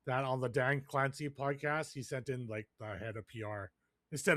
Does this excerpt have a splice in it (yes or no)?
no